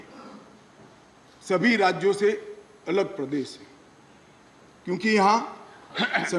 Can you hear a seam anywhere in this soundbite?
no; 0 cuts

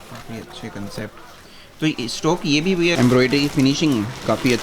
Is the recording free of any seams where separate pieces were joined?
no; 1 cut; at 2.9 s

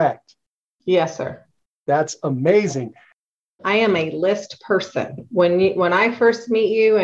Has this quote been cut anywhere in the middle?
yes; 1 cut; at 3.2 s

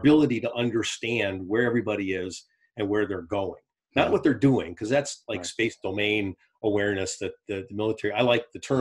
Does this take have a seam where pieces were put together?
no; 0 cuts

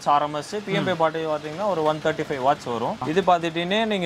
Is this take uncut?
no; 1 cut; at 3.0 s

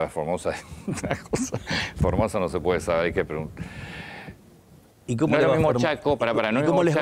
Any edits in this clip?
no; 0 cuts

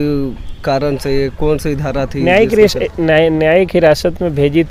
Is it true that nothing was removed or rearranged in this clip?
yes; 0 cuts

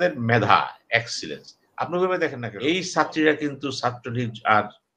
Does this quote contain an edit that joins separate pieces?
yes; 1 cut; at 2.5 s

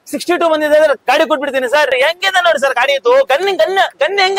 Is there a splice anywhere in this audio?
yes; 1 cut; at 1.9 s

